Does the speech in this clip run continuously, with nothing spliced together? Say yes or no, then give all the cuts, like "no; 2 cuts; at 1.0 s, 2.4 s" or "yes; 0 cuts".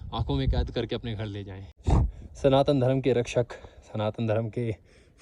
no; 1 cut; at 1.9 s